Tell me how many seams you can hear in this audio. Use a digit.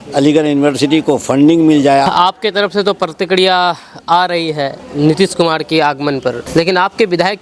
3